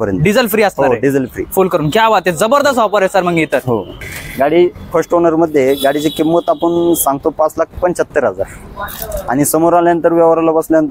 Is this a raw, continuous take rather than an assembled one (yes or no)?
no